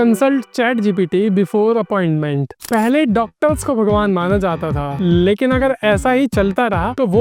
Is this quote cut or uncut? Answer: uncut